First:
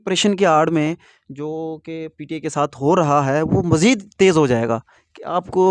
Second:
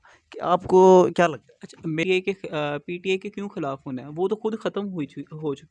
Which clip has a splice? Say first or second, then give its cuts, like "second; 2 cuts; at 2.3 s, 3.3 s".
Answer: second; 1 cut; at 2.0 s